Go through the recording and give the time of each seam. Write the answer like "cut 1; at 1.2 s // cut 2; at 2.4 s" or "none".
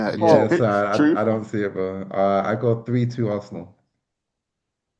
none